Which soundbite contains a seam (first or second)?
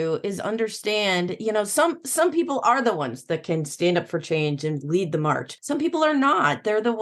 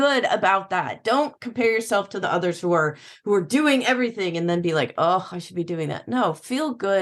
first